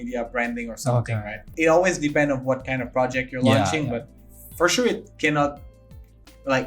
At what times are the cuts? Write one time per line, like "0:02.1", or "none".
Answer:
0:01.4